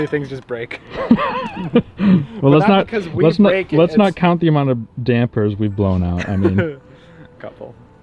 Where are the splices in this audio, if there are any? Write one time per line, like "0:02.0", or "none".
none